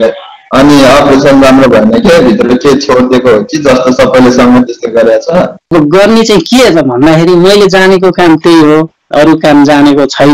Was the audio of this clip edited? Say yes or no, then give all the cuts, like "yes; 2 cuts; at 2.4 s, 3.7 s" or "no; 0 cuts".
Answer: yes; 1 cut; at 5.6 s